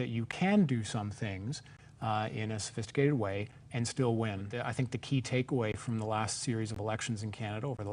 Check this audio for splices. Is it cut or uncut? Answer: cut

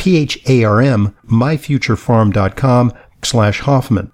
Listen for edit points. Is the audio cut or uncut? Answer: cut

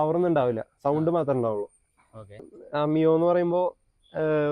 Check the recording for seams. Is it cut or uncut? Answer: cut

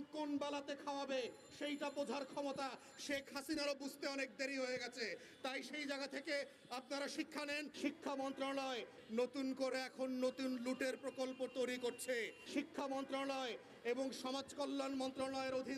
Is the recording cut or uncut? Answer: cut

